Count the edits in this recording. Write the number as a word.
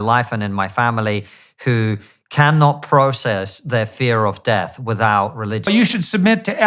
one